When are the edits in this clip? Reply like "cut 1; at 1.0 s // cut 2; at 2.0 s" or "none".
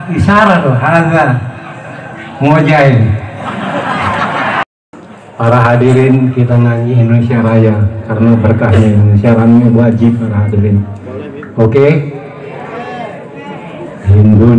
cut 1; at 4.6 s